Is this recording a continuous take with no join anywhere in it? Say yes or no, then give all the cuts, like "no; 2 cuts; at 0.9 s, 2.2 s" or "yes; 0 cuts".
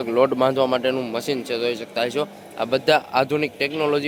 yes; 0 cuts